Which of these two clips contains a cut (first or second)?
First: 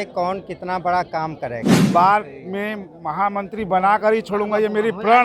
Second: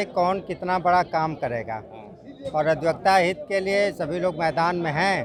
first